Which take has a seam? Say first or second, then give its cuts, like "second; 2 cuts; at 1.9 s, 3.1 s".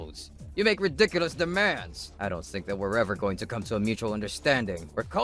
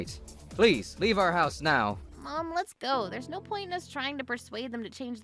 second; 1 cut; at 2.1 s